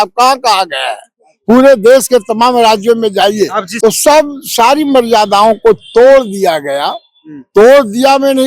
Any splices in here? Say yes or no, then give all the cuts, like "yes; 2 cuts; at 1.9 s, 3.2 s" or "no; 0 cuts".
yes; 1 cut; at 3.6 s